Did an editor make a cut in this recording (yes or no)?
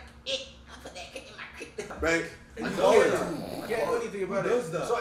yes